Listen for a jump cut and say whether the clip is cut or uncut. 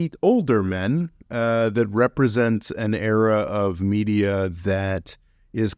uncut